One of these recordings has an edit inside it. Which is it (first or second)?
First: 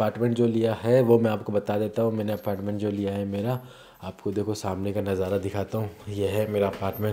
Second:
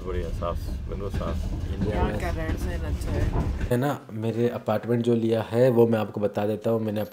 second